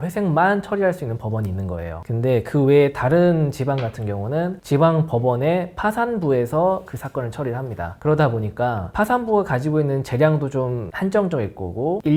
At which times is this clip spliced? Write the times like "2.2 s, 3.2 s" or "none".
none